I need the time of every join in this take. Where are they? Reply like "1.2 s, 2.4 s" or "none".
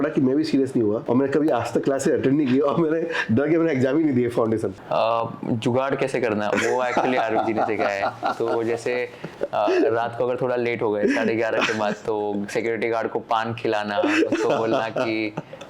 1.0 s, 4.8 s